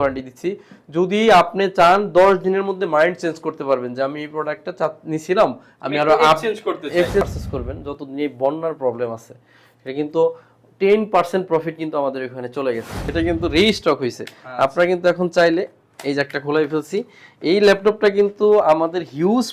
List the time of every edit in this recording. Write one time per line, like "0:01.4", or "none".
0:07.3
0:13.0